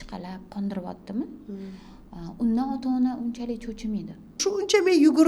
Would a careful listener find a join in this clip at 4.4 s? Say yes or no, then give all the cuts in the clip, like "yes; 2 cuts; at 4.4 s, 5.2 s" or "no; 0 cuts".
yes; 1 cut; at 4.4 s